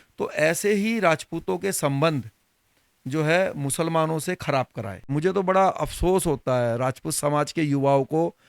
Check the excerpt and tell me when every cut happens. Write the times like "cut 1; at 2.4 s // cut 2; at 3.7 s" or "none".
cut 1; at 5.1 s